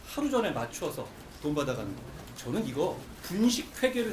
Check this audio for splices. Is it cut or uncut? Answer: cut